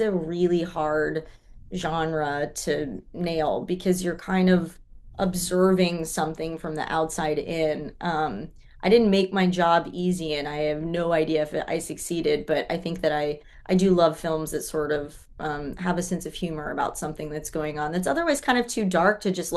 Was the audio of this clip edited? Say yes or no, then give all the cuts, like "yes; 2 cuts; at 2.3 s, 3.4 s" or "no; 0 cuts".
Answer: no; 0 cuts